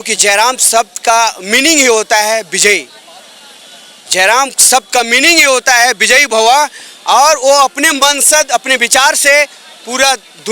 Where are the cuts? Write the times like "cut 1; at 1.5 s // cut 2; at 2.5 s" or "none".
none